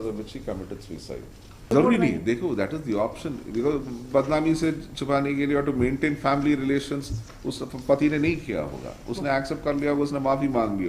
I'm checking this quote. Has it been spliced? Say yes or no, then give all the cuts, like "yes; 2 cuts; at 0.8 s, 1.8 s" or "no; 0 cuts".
yes; 1 cut; at 1.7 s